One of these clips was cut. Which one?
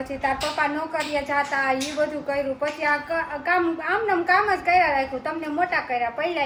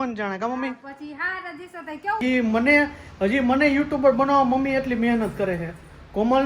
second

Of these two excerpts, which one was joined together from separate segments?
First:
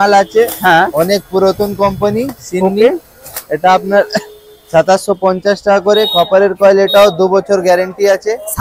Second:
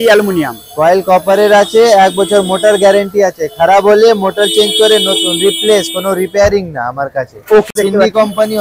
second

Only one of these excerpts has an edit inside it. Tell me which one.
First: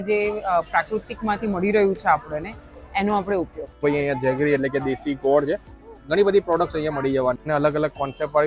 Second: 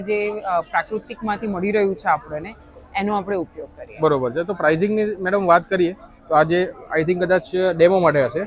first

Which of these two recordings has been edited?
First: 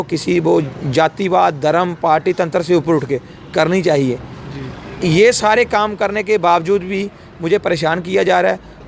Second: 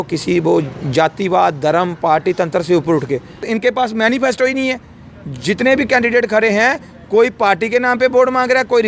second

